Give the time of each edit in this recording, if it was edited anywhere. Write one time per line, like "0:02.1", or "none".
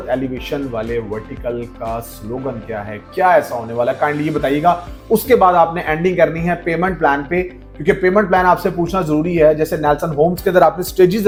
none